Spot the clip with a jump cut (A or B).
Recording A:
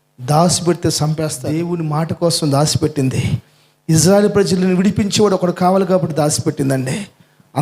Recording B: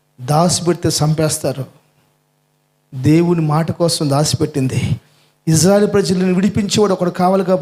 A